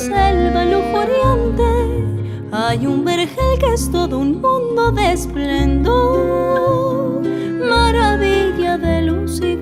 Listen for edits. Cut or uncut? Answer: uncut